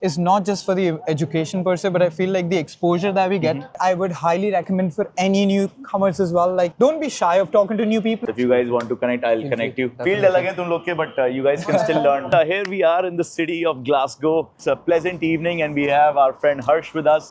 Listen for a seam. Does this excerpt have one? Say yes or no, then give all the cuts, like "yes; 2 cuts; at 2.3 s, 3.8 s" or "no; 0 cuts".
yes; 4 cuts; at 3.7 s, 8.2 s, 9.9 s, 12.3 s